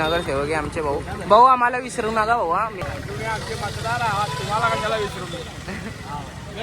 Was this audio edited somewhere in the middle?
yes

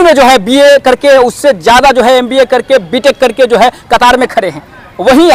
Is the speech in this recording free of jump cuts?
yes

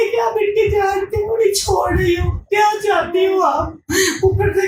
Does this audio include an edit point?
no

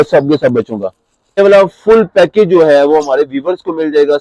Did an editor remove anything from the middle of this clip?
yes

